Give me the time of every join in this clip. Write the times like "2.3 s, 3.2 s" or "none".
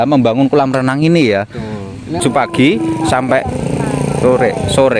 2.2 s